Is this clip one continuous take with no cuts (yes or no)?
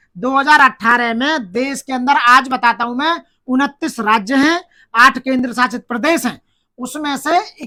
yes